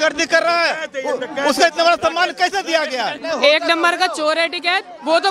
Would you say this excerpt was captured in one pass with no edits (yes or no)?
no